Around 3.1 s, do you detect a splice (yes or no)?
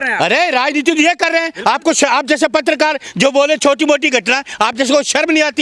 no